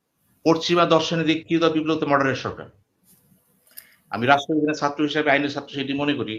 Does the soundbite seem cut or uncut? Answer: uncut